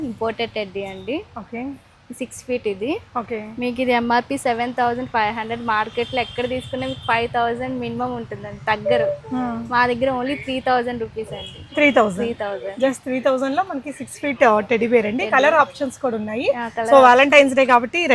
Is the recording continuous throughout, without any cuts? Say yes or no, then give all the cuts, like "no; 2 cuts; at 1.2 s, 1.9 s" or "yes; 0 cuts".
yes; 0 cuts